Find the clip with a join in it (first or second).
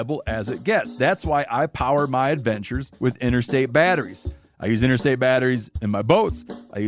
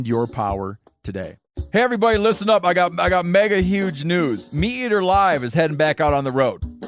second